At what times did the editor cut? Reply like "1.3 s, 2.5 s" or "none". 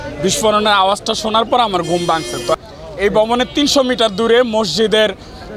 2.6 s